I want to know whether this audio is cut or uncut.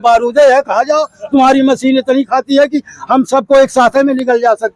uncut